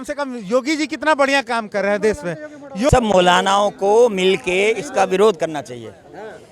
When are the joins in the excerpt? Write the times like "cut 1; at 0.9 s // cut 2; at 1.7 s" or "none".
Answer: cut 1; at 2.9 s